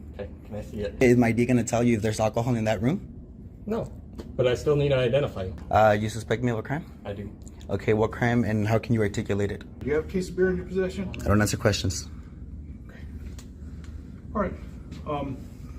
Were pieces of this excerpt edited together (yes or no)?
yes